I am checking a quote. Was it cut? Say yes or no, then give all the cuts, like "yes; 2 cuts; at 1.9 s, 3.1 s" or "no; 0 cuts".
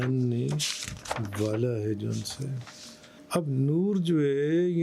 yes; 1 cut; at 3.1 s